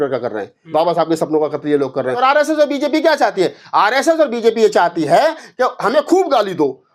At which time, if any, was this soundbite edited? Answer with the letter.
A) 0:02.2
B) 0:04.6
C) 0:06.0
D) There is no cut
A